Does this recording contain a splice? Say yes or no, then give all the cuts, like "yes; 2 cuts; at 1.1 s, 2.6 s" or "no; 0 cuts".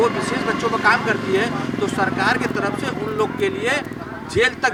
no; 0 cuts